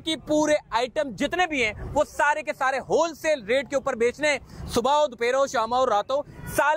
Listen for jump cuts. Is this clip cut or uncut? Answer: uncut